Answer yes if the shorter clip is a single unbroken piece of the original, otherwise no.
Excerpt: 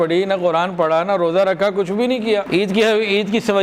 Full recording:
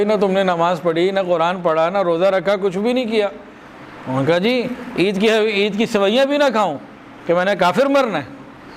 no